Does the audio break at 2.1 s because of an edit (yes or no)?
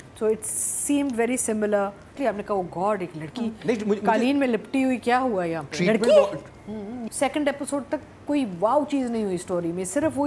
yes